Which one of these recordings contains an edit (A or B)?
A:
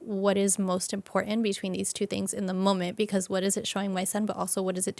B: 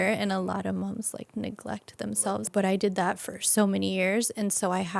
B